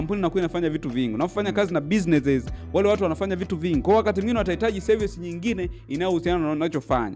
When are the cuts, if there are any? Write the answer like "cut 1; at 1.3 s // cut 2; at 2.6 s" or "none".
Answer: none